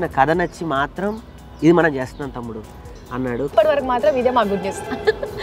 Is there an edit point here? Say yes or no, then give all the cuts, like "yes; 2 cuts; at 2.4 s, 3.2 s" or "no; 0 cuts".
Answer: yes; 1 cut; at 3.5 s